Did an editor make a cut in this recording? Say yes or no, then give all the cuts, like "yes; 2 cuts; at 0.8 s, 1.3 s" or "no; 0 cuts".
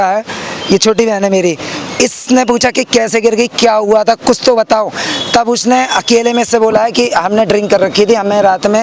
no; 0 cuts